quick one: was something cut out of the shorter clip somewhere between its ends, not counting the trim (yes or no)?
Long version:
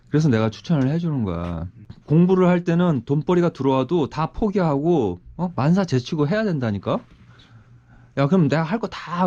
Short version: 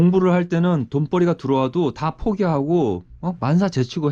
no